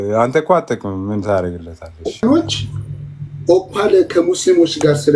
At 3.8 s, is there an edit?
no; 1 cut; at 2.2 s

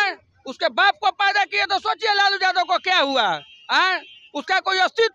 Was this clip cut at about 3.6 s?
no; 0 cuts

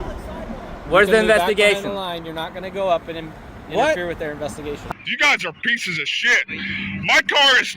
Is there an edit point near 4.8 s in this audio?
yes; 1 cut; at 4.8 s

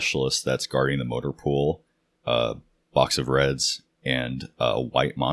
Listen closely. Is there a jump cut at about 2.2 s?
no; 0 cuts

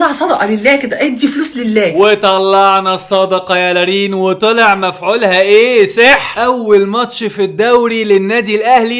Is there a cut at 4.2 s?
no; 0 cuts

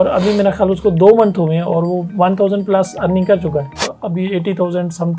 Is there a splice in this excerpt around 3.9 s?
yes; 1 cut; at 3.9 s

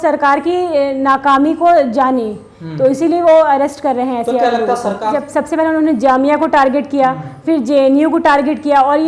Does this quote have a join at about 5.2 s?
yes; 1 cut; at 5.2 s

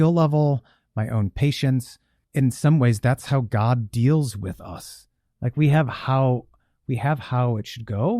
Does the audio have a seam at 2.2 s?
yes; 1 cut; at 2.2 s

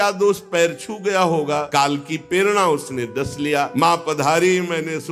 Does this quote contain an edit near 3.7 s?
yes; 2 cuts; at 1.7 s, 3.7 s

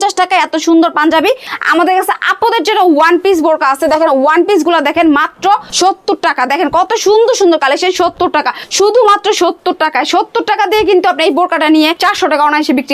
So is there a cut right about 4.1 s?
no; 4 cuts; at 1.5 s, 5.7 s, 8.6 s, 12.0 s

